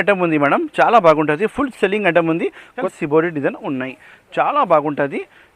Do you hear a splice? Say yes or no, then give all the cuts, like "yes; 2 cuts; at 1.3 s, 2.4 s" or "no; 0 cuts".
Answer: yes; 1 cut; at 2.8 s